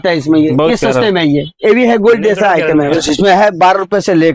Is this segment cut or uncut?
cut